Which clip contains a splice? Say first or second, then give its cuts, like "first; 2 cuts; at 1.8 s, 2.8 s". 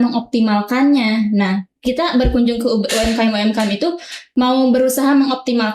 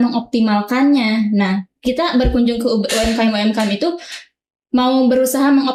first; 1 cut; at 4.1 s